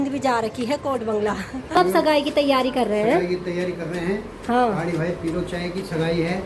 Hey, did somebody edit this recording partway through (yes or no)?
yes